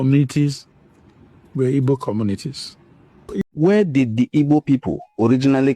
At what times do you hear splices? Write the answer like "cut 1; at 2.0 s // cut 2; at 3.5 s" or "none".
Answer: cut 1; at 3.4 s